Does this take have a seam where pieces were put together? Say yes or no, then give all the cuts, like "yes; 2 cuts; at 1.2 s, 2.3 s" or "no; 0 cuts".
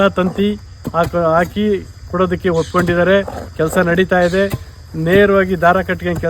no; 0 cuts